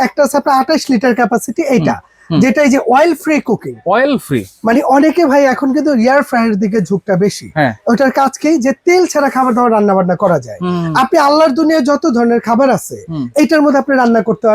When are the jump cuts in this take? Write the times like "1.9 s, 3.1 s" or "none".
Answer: none